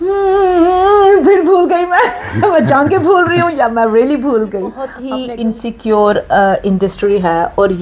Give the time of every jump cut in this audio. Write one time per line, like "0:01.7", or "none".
0:05.0